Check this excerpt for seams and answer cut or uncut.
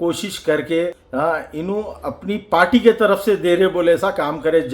cut